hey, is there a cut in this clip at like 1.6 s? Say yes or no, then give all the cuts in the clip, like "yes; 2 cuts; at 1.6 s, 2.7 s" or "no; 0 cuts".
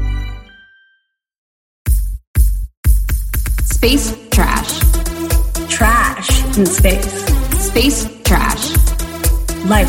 yes; 1 cut; at 1.6 s